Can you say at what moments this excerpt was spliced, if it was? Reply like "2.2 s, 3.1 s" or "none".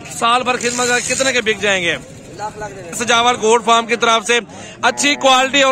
3.0 s